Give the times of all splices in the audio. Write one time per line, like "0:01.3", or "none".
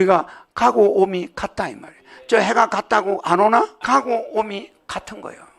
0:03.8